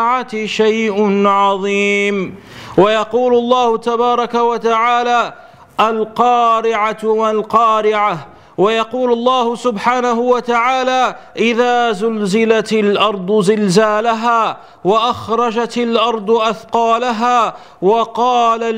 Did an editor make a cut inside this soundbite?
no; 0 cuts

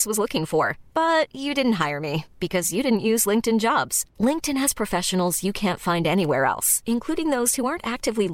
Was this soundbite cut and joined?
no; 0 cuts

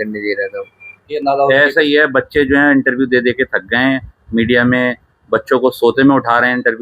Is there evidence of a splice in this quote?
yes; 1 cut; at 1.1 s

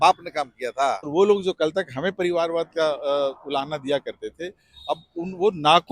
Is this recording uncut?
no; 1 cut; at 1.1 s

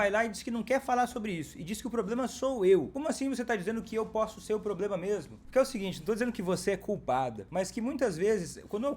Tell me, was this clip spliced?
yes; 3 cuts; at 2.9 s, 5.4 s, 7.4 s

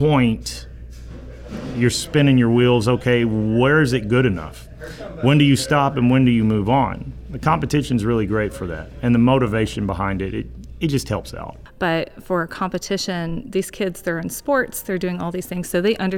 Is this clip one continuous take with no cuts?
no; 1 cut; at 11.4 s

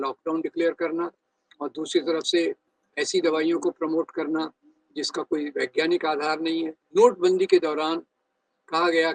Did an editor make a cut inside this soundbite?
yes; 1 cut; at 6.8 s

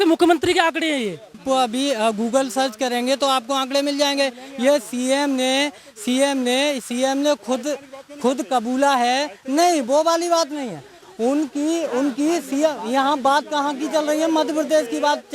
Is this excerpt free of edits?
no; 1 cut; at 1.4 s

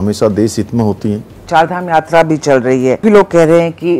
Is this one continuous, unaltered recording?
no; 2 cuts; at 1.3 s, 3.0 s

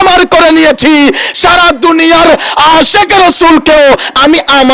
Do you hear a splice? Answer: no; 0 cuts

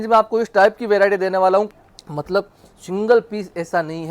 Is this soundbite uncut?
no; 1 cut; at 1.8 s

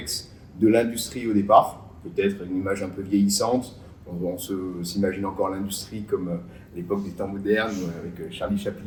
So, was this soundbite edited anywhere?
no; 0 cuts

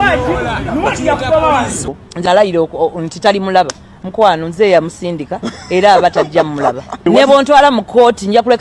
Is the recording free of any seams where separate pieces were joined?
no; 1 cut; at 1.9 s

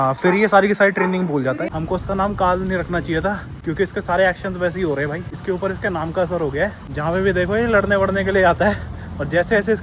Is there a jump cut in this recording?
yes; 4 cuts; at 1.7 s, 3.5 s, 5.3 s, 6.9 s

